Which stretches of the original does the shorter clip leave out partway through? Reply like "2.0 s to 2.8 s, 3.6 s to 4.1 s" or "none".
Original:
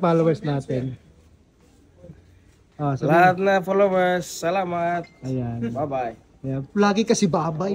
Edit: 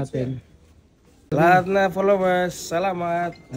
1.8 s to 3.0 s